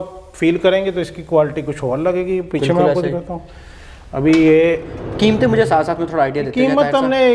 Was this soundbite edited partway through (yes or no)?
no